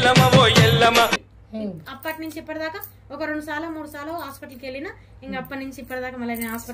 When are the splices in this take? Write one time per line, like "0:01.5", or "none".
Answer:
none